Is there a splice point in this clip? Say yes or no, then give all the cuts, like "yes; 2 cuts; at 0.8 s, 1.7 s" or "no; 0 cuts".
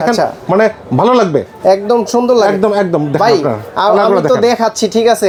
no; 0 cuts